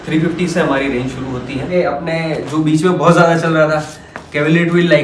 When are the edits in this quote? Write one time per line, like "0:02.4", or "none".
0:01.7